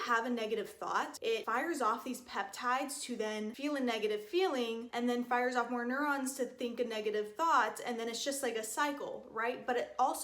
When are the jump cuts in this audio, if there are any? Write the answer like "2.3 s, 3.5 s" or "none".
1.4 s, 3.5 s